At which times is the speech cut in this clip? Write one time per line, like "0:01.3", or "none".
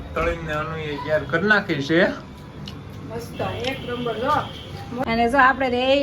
0:05.0